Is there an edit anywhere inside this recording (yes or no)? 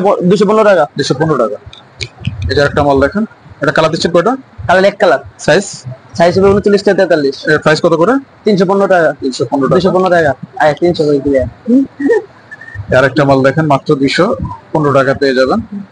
no